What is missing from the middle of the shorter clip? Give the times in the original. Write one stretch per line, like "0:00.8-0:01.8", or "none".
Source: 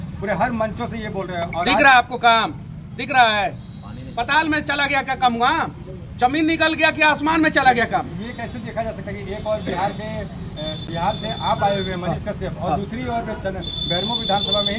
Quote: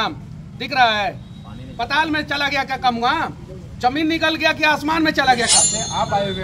0:07.9-0:11.0